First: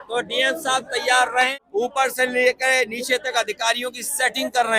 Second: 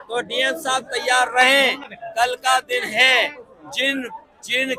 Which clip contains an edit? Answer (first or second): first